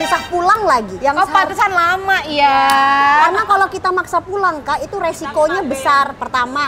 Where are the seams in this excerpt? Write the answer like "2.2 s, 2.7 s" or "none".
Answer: none